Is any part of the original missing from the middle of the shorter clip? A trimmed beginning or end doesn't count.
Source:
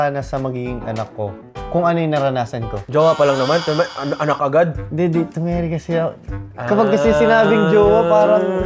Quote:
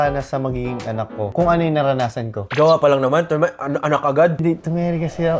yes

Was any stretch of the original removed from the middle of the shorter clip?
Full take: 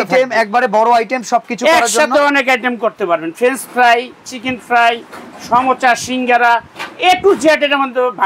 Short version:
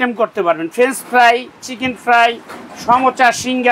no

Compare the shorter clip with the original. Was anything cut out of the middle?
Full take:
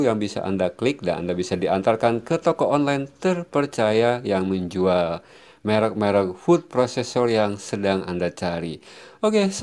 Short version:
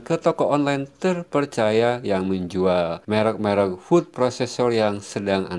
yes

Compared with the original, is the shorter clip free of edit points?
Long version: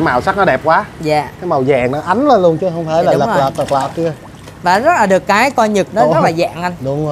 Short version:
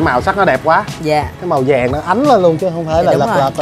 yes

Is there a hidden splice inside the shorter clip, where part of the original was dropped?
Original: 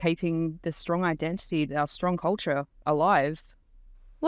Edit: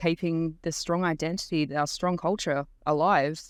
no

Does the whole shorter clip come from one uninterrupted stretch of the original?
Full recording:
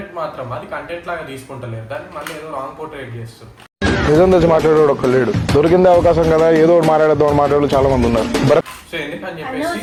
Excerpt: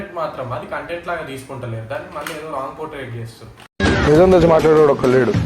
yes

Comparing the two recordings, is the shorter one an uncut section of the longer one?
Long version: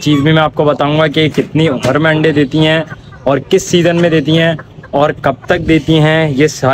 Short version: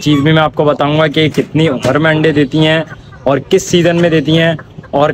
yes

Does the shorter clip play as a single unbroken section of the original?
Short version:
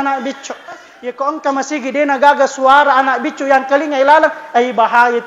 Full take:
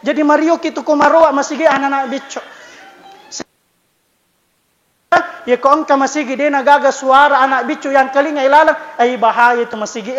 no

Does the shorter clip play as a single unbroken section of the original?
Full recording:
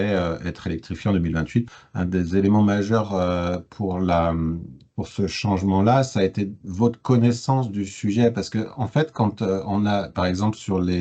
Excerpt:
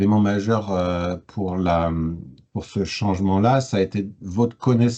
yes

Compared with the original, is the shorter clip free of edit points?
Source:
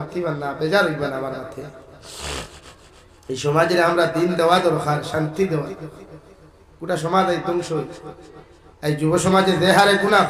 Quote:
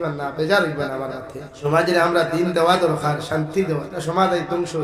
no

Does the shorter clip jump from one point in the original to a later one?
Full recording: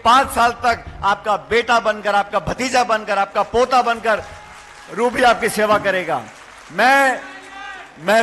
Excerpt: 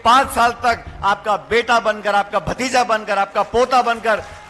no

